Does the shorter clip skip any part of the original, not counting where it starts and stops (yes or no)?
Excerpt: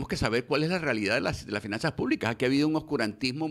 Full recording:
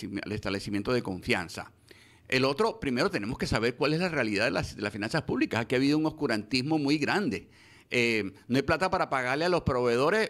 no